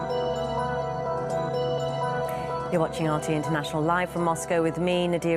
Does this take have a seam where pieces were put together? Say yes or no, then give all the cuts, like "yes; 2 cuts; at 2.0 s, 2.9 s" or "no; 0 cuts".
yes; 1 cut; at 3.9 s